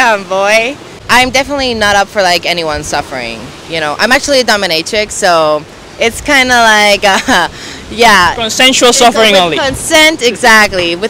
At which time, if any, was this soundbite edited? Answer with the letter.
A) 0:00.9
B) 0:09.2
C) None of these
A